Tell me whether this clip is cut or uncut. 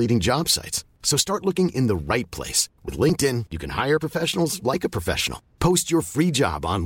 uncut